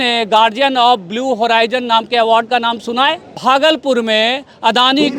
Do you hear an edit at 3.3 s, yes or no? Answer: yes